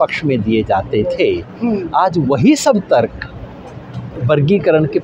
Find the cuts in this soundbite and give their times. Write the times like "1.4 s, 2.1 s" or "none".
none